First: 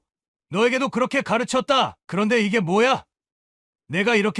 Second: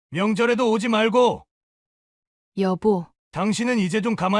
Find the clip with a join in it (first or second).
second